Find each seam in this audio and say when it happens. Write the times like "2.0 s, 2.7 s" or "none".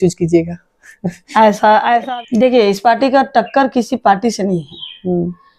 2.0 s